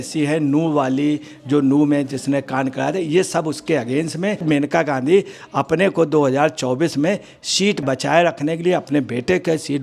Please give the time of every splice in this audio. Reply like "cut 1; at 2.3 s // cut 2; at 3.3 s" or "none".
cut 1; at 4.4 s // cut 2; at 7.8 s

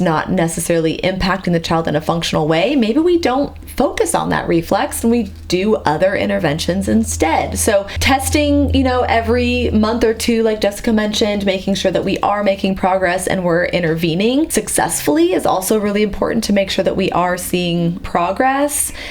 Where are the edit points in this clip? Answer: cut 1; at 7.9 s // cut 2; at 18.0 s

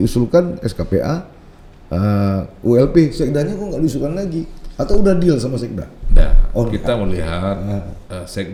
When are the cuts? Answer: none

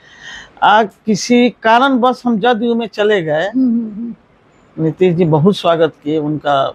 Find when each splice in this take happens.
none

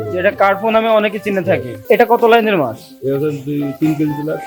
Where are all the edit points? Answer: cut 1; at 1.8 s

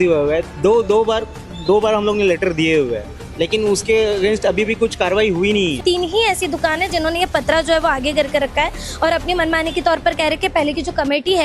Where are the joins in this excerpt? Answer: cut 1; at 5.8 s

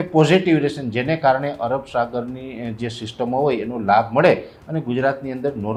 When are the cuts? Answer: none

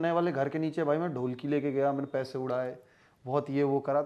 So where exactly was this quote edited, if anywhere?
none

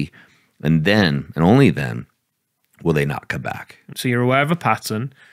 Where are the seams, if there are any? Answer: cut 1; at 3.9 s

